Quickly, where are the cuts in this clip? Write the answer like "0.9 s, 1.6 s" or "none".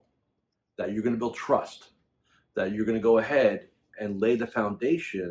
4.1 s